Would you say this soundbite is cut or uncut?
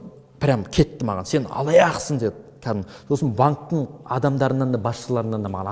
uncut